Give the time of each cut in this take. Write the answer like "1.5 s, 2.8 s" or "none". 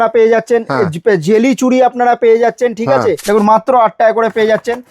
3.2 s